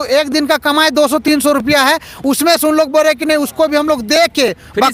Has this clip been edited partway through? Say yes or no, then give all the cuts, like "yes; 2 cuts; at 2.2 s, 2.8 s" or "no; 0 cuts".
no; 0 cuts